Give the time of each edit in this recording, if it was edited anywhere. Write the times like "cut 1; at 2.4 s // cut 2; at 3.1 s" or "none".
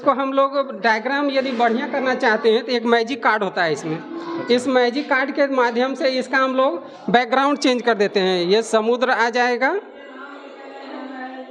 none